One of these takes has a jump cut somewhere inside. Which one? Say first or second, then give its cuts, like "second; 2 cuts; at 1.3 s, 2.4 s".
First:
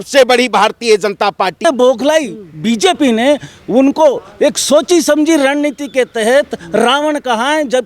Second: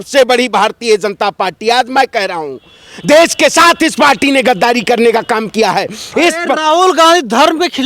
first; 1 cut; at 1.6 s